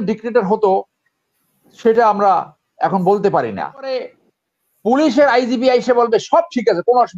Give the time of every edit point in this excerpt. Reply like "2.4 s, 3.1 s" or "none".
4.1 s